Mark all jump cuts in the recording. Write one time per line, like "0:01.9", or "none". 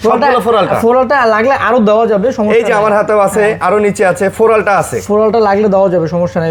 none